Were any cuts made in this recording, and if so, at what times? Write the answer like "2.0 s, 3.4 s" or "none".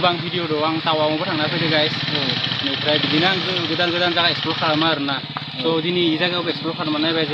none

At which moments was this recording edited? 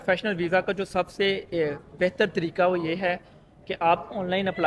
none

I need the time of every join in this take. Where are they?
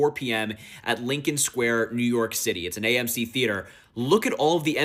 none

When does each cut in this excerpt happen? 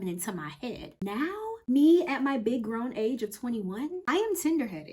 0.9 s, 4.0 s

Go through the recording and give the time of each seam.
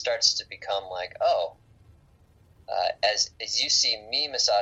none

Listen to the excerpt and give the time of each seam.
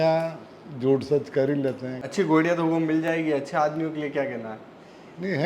1.9 s

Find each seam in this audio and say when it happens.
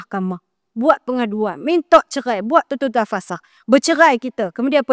none

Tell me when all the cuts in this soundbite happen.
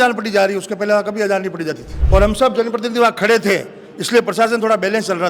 1.9 s

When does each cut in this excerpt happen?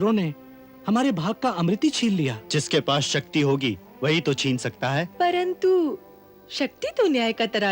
2.4 s, 5.1 s

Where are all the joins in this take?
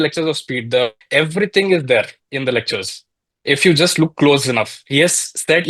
1.0 s

